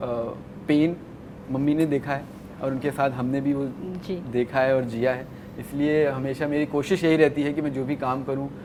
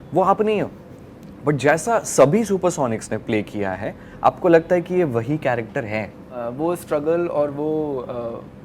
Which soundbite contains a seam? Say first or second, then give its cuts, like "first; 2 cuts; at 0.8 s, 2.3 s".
second; 1 cut; at 6.4 s